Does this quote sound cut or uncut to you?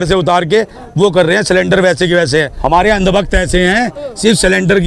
cut